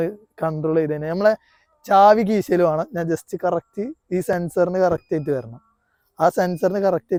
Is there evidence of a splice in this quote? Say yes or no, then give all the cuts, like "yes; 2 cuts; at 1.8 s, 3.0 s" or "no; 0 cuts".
no; 0 cuts